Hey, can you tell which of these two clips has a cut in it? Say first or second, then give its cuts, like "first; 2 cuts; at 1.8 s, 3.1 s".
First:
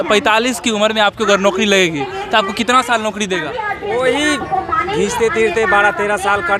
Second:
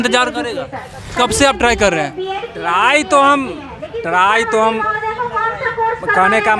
second; 1 cut; at 1.0 s